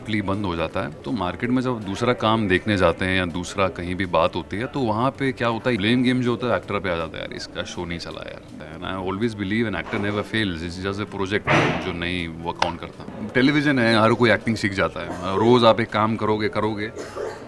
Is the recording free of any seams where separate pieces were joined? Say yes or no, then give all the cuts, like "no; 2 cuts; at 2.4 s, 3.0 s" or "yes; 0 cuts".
no; 4 cuts; at 1.0 s, 5.8 s, 8.5 s, 13.1 s